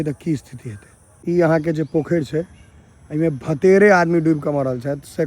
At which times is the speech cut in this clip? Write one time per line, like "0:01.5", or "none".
0:01.3